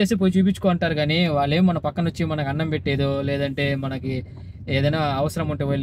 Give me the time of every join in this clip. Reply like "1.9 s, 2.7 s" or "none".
none